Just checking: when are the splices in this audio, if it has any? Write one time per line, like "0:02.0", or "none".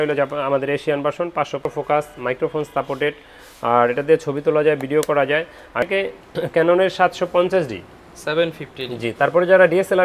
0:01.7
0:05.8